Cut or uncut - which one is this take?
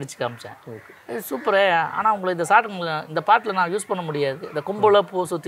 uncut